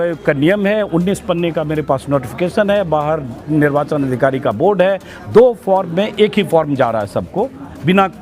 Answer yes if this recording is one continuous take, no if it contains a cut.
yes